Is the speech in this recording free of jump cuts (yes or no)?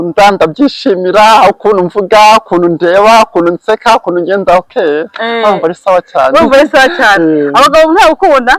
yes